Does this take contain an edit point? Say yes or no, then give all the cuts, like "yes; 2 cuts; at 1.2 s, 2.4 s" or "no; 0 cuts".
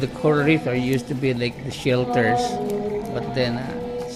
no; 0 cuts